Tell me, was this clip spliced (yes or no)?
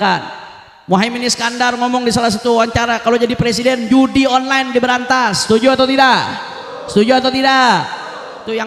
no